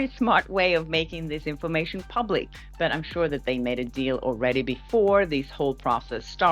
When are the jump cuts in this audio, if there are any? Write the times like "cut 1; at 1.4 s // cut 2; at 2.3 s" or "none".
cut 1; at 2.6 s